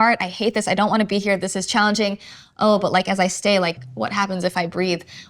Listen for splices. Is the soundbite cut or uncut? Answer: cut